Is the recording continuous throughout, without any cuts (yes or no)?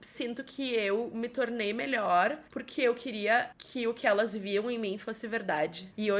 yes